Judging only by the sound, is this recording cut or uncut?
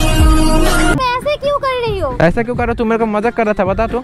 cut